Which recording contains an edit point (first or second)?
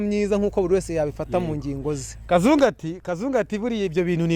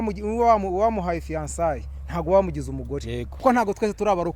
second